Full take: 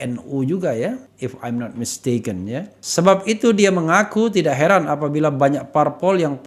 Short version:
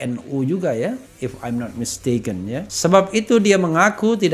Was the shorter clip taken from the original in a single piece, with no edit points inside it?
no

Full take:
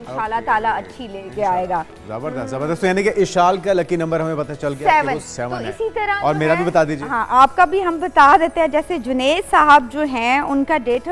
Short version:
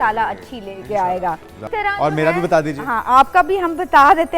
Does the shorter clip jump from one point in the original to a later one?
yes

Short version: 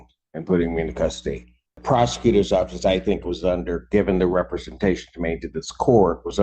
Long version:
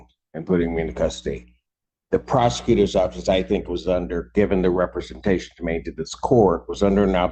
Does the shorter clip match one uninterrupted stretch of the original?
no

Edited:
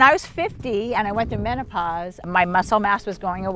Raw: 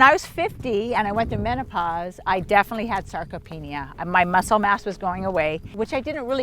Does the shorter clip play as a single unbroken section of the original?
no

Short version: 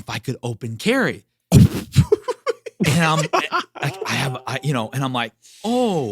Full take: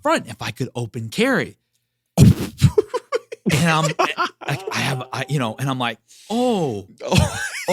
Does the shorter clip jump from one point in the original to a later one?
yes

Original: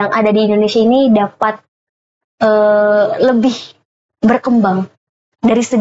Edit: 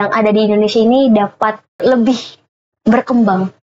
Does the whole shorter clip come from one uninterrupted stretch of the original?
no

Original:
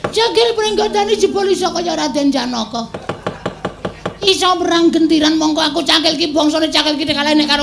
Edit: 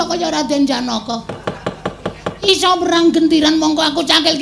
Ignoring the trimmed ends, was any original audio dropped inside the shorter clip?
yes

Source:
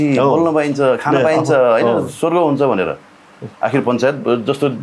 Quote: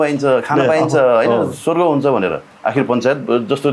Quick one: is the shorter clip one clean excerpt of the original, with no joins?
no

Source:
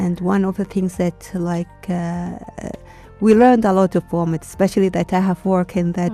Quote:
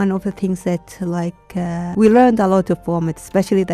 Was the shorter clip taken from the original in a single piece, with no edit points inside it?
no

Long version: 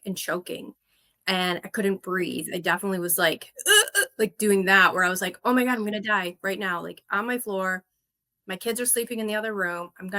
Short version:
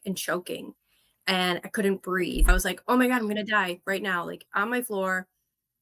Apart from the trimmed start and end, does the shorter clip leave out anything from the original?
yes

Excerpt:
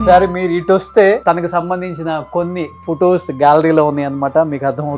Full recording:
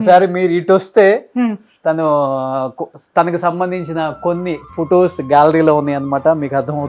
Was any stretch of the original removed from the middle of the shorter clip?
yes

